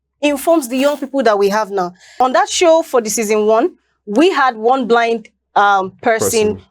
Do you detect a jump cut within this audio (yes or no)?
yes